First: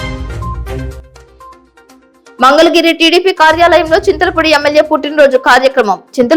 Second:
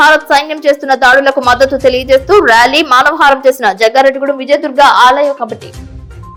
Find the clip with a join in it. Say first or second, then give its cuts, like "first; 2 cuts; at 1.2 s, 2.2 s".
first; 1 cut; at 1.0 s